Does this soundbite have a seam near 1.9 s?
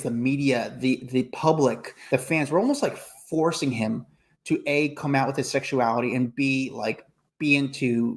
yes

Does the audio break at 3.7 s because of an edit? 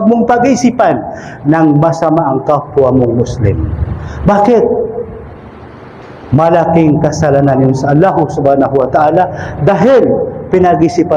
no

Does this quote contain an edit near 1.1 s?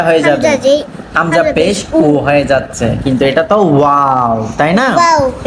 no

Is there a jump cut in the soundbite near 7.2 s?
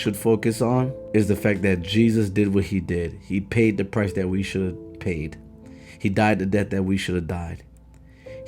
no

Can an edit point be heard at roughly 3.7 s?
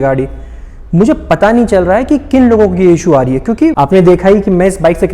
yes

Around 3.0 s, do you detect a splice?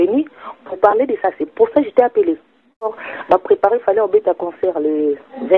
yes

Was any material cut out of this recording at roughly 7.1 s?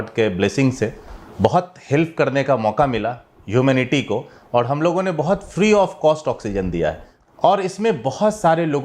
yes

